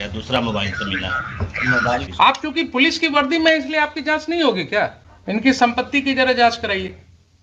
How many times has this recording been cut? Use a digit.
2